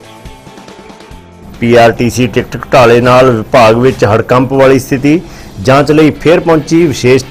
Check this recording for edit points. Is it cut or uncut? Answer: cut